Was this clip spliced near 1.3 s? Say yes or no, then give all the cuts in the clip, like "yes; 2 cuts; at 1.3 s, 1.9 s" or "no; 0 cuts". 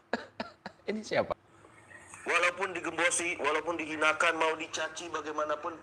yes; 1 cut; at 1.3 s